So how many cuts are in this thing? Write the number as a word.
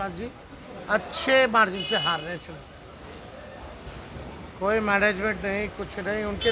zero